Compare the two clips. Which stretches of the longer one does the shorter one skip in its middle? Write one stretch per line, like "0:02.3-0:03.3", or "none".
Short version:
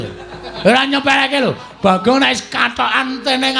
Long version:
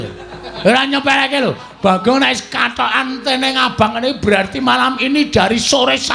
none